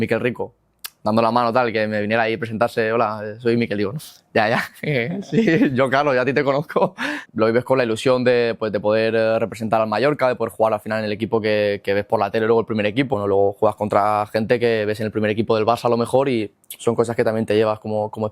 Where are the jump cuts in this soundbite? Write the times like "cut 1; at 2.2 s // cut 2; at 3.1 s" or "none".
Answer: cut 1; at 7.2 s // cut 2; at 13.1 s